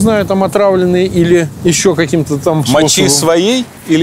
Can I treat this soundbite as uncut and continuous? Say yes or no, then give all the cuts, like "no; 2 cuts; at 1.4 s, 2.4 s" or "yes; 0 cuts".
no; 1 cut; at 1.5 s